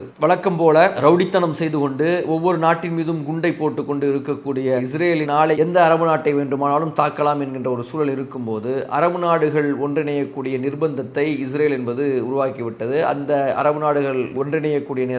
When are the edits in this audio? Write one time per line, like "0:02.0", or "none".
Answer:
0:01.0